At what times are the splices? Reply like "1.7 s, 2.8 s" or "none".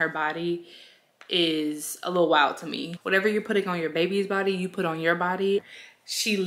2.9 s, 5.6 s